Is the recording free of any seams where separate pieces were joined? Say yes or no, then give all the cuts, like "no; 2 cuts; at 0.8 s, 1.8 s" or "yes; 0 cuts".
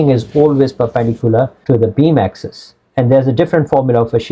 no; 1 cut; at 1.6 s